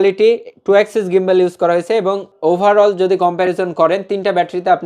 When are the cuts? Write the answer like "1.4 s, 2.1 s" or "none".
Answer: 2.3 s